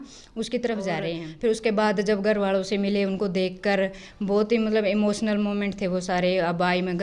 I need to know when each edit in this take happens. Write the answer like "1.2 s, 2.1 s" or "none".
1.3 s